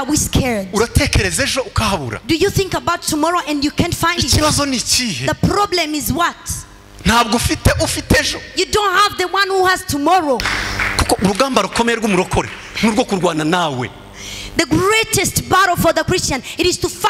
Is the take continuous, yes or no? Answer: no